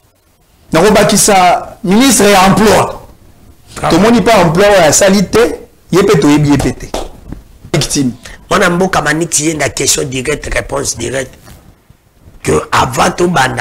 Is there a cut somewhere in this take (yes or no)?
yes